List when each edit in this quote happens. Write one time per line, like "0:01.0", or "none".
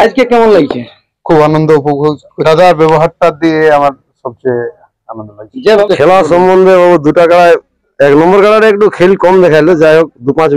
0:02.3
0:05.9

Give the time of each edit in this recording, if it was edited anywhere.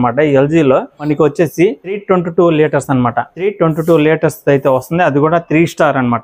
none

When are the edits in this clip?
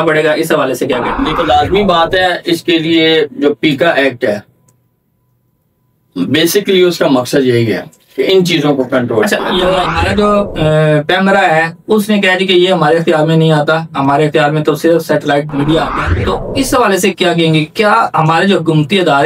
0:01.2
0:09.6
0:15.9

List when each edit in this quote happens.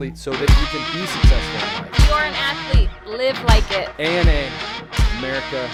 none

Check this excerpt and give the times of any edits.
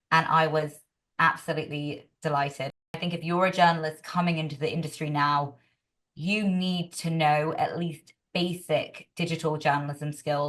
0:03.0

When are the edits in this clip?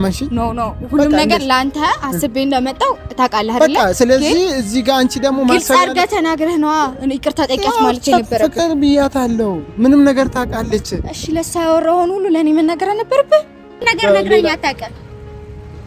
0:13.9

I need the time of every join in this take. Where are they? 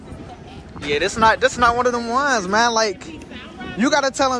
none

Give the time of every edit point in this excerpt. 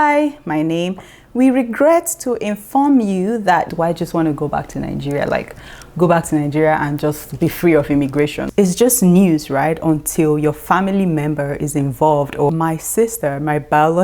0:03.7
0:08.4
0:12.5

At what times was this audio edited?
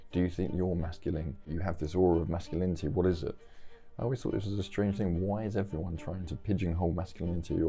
0:01.5

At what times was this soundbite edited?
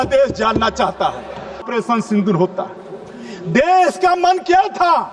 0:01.7

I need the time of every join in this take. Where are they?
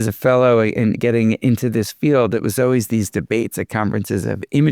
0:01.0

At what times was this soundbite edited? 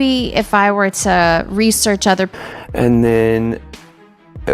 0:02.3

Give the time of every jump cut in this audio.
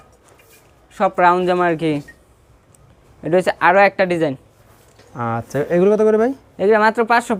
none

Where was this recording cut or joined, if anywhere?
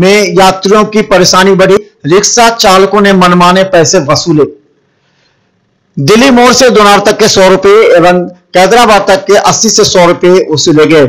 0:01.8

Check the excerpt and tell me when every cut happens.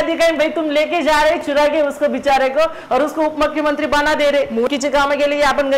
0:04.7

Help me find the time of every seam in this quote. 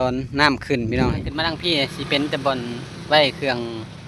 0:01.6

